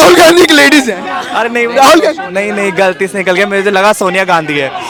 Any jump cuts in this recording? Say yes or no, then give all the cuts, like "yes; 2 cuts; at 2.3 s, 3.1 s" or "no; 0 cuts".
no; 0 cuts